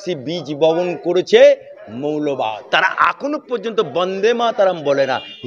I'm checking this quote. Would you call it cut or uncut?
cut